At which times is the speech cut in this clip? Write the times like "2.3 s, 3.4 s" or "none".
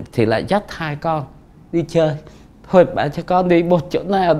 none